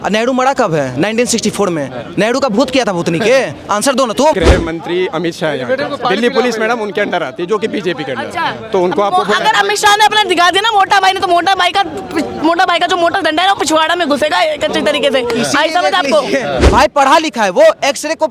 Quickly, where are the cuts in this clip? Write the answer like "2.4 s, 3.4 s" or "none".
4.3 s, 16.6 s